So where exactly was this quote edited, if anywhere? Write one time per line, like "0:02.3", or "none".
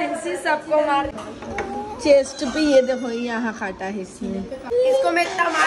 0:01.1
0:04.6

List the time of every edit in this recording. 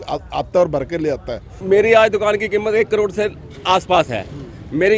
0:01.5

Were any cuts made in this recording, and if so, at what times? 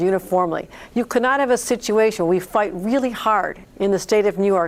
none

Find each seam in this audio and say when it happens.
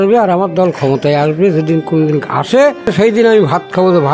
0:02.9

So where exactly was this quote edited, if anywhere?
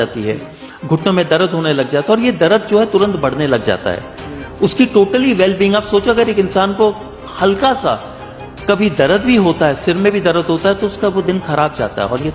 none

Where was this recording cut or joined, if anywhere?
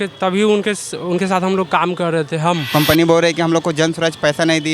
0:02.6

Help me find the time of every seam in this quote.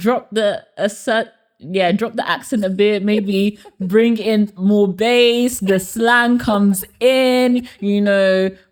none

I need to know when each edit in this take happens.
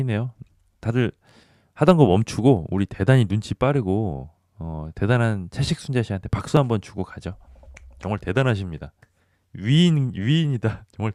none

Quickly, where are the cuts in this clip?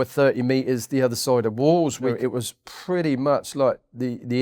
0:02.1

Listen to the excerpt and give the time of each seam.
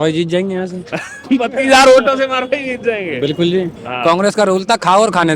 0:03.8

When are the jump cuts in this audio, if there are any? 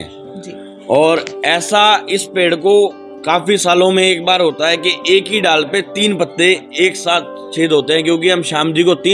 none

